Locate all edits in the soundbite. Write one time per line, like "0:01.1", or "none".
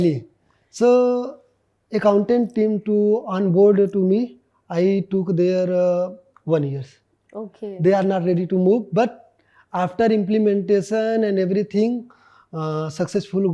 none

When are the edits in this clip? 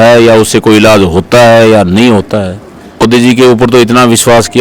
0:03.0

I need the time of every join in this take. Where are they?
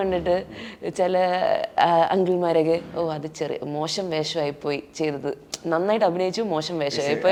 none

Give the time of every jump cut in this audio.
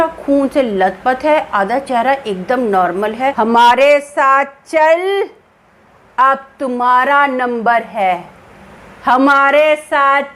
0:03.3

